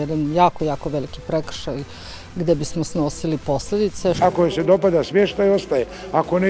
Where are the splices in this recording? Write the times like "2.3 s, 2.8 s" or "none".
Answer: 4.2 s